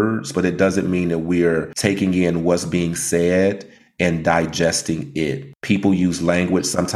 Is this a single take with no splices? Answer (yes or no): no